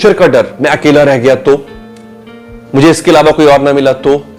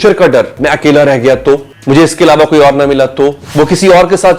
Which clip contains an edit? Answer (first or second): second